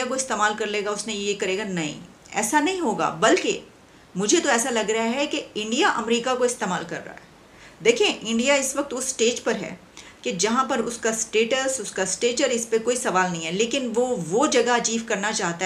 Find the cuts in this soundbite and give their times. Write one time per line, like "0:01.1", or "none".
none